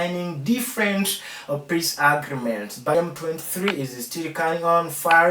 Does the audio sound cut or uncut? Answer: cut